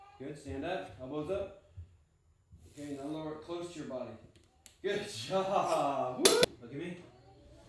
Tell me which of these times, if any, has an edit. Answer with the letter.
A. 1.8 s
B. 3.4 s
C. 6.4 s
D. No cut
C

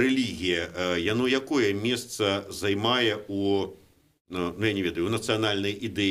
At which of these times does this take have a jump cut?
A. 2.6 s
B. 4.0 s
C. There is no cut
C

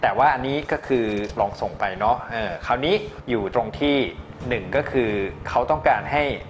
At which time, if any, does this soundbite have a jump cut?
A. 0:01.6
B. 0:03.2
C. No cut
B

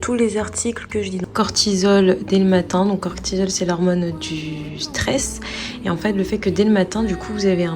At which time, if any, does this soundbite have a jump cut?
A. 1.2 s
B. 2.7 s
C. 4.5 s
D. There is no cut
A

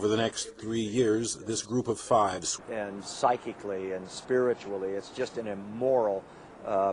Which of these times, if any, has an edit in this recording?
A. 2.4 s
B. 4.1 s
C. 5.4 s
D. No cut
D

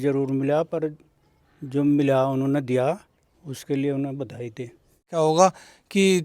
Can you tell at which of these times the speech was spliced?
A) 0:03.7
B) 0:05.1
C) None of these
B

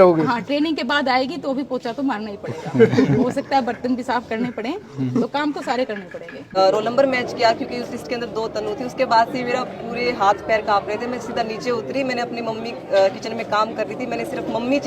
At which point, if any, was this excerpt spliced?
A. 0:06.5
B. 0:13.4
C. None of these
A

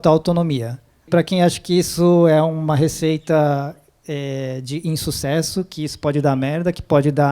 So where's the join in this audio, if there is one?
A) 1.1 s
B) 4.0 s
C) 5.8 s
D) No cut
A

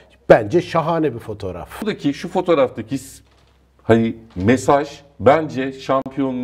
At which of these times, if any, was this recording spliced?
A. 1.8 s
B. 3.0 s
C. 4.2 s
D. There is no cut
A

